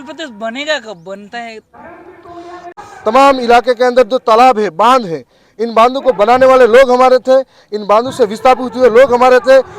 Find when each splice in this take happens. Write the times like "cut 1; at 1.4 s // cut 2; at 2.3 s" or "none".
cut 1; at 2.6 s